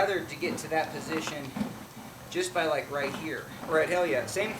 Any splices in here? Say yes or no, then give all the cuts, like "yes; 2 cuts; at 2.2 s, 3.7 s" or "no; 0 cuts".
yes; 1 cut; at 3.5 s